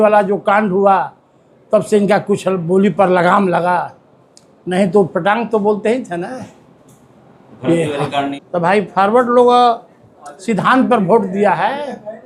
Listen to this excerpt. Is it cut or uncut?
cut